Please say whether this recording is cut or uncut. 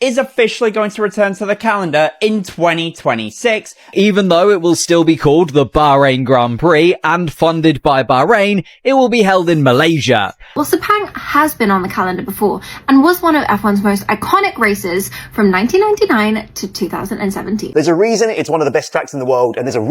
cut